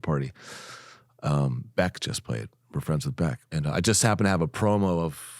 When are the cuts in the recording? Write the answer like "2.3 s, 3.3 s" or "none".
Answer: 3.4 s